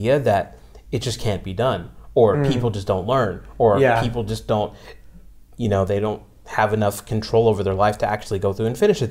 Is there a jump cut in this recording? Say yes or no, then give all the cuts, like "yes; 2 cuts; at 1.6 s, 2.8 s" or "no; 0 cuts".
no; 0 cuts